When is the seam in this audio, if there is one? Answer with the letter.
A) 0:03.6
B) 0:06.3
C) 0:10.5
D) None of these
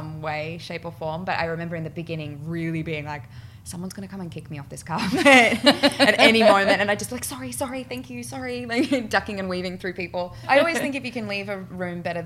C